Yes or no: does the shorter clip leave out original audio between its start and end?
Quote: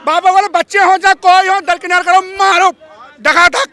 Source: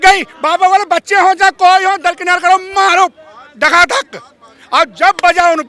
no